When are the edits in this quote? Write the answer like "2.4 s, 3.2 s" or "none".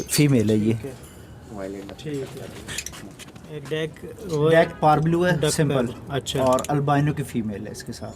3.6 s